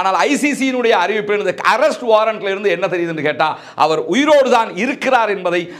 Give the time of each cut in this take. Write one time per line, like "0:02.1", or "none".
none

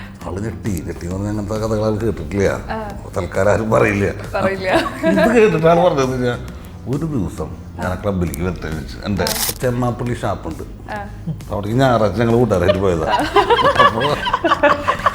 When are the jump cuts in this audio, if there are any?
0:09.5

